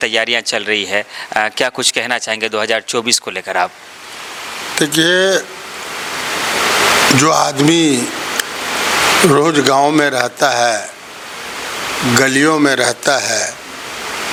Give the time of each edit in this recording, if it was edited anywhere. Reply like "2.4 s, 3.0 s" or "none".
none